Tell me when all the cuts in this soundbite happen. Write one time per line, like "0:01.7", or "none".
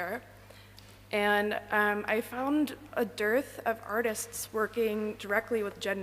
0:01.7

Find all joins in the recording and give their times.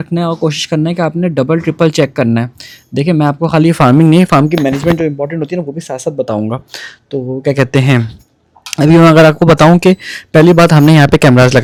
none

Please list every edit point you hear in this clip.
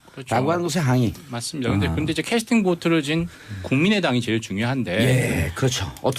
0:02.6

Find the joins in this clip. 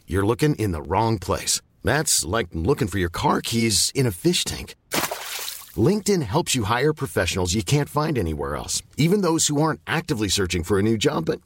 none

